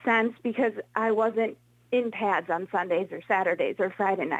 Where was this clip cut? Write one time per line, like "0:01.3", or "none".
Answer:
none

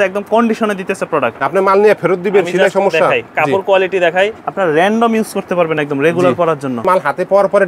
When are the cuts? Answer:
0:01.3
0:04.4
0:06.8

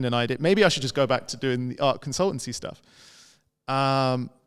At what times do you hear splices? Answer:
none

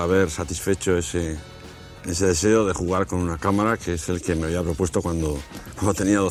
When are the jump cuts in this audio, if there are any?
none

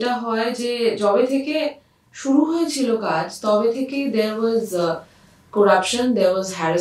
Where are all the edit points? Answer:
none

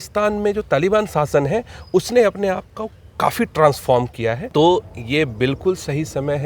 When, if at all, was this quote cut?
0:04.4

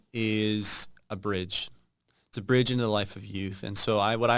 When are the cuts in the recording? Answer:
none

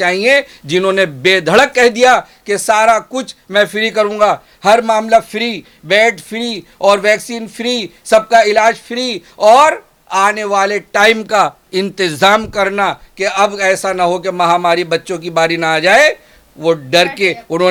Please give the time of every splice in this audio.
none

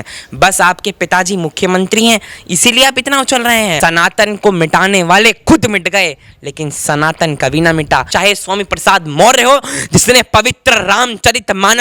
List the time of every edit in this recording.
0:03.7
0:08.1

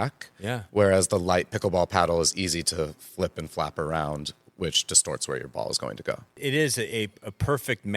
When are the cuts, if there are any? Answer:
0:06.3

